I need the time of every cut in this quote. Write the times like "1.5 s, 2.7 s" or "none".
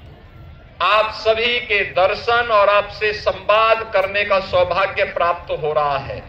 none